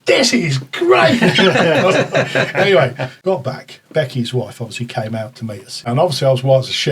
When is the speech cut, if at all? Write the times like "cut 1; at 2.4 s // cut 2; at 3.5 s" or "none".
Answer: cut 1; at 3.1 s // cut 2; at 5.9 s